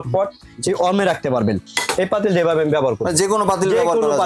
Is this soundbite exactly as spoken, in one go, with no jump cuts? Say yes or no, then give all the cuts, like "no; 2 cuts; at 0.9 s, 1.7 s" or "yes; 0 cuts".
no; 1 cut; at 1.7 s